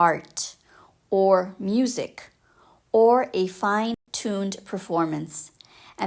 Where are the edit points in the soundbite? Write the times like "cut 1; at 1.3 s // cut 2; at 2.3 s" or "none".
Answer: cut 1; at 4.0 s